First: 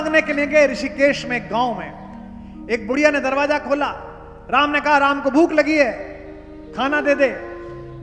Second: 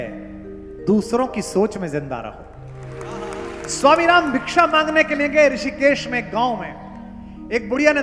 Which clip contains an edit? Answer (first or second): second